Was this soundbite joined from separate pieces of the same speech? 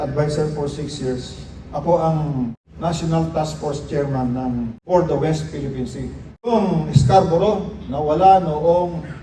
yes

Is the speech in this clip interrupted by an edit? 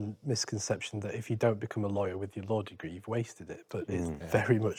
no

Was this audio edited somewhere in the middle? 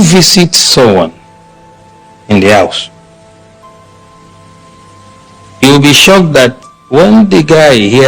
yes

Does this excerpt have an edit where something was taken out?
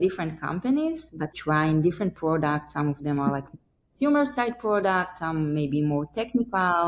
yes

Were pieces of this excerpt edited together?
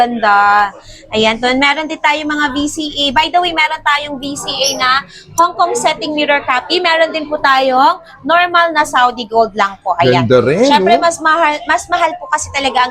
no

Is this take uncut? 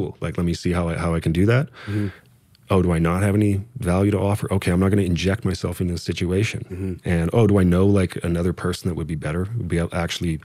yes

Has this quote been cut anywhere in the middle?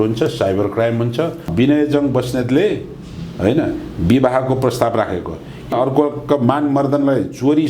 yes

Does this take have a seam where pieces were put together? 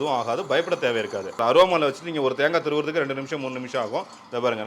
yes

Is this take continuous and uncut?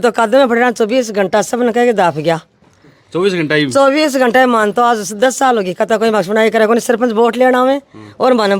yes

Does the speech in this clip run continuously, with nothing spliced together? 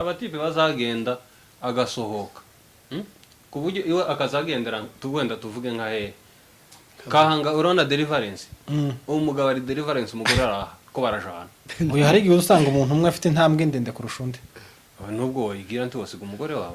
yes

